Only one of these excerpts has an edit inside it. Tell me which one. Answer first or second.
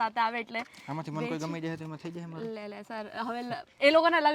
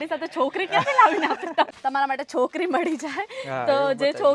second